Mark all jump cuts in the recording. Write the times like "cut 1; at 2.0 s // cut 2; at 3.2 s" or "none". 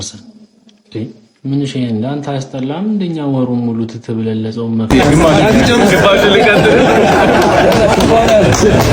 cut 1; at 4.8 s